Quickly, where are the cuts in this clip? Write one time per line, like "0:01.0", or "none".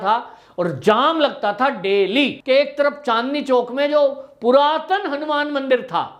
0:02.4